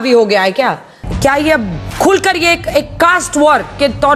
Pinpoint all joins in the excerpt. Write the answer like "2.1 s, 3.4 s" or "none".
1.0 s